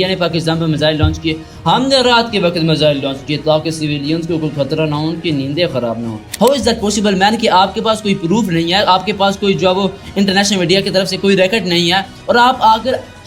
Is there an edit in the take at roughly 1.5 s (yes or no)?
no